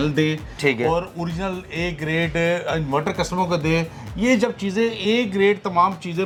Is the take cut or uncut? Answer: uncut